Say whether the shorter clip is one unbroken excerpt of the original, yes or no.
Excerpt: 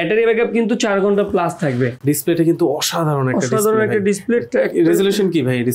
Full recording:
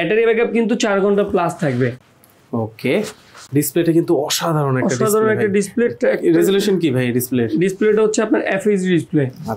no